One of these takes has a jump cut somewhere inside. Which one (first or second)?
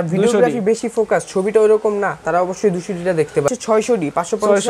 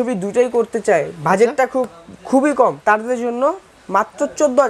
first